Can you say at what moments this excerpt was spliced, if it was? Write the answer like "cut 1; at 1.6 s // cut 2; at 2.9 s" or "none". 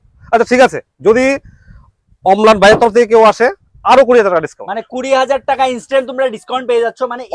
none